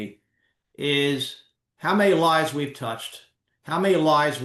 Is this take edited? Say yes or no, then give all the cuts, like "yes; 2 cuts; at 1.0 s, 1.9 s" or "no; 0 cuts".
no; 0 cuts